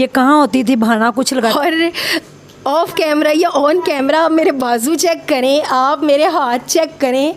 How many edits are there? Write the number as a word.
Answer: one